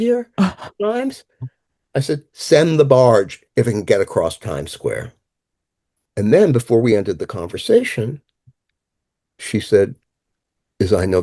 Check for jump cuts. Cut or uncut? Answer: uncut